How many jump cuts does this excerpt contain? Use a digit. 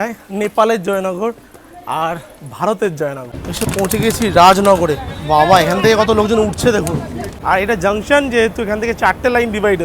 2